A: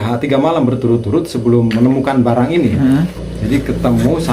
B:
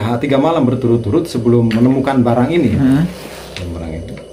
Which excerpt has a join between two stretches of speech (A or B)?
A